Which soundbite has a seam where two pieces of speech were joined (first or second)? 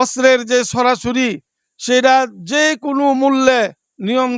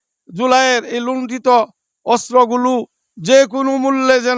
first